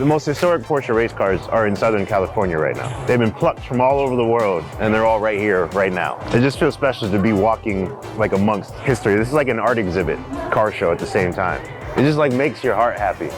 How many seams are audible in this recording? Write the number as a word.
six